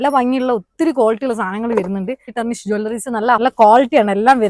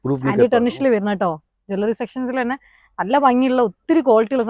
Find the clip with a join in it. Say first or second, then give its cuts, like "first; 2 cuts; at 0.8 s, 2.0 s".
first; 2 cuts; at 2.3 s, 3.4 s